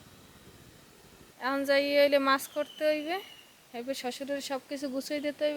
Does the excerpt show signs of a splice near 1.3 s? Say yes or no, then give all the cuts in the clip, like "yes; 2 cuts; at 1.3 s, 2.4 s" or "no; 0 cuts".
yes; 1 cut; at 1.3 s